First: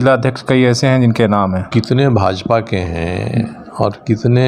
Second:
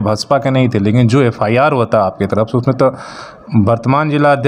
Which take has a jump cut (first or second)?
first